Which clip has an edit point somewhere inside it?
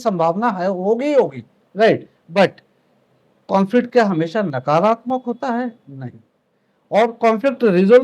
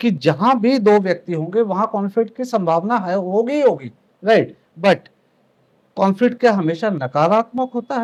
first; 1 cut; at 6.5 s

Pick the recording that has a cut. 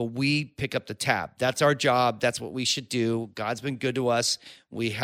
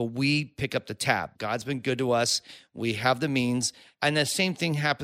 second; 2 cuts; at 1.3 s, 3.8 s

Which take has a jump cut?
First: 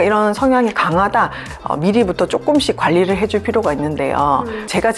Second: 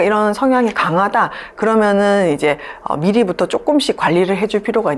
first; 1 cut; at 1.5 s

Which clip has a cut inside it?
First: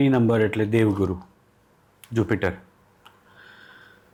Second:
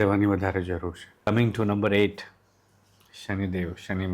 second; 1 cut; at 1.3 s

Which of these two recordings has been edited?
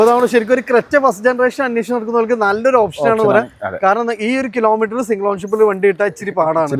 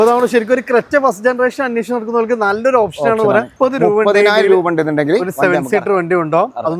second; 1 cut; at 3.5 s

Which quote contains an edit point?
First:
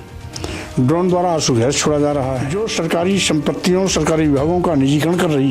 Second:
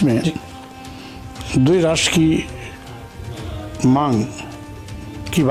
first; 1 cut; at 2.5 s

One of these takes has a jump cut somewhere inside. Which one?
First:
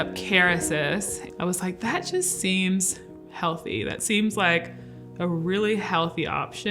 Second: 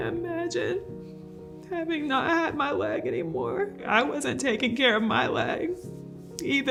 first; 1 cut; at 1.2 s

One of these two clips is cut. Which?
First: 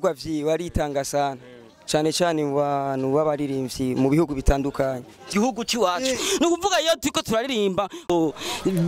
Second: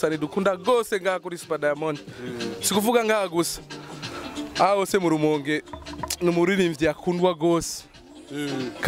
first; 1 cut; at 5.3 s

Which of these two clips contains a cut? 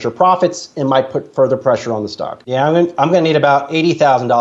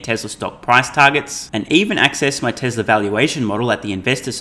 first; 1 cut; at 2.3 s

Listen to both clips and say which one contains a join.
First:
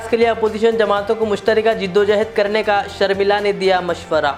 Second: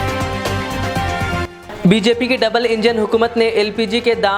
second; 1 cut; at 1.4 s

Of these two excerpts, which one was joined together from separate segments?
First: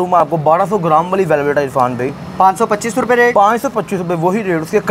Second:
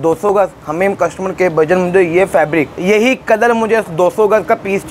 second; 1 cut; at 2.7 s

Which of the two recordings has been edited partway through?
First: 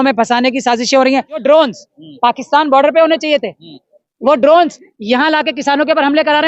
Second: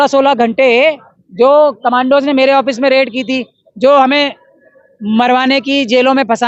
first; 1 cut; at 1.4 s

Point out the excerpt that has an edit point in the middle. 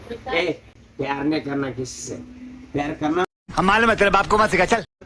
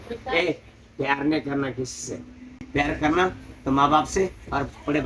second; 1 cut; at 3.4 s

